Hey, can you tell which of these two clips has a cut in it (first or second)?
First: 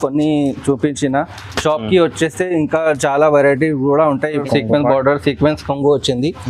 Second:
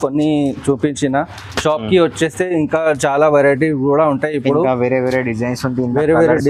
first